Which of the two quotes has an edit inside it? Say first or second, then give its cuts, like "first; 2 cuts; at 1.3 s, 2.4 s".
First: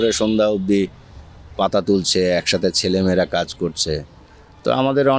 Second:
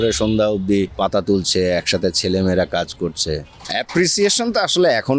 second; 2 cuts; at 0.9 s, 3.6 s